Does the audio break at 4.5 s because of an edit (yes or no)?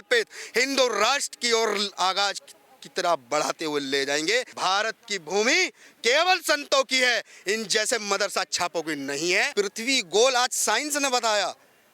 yes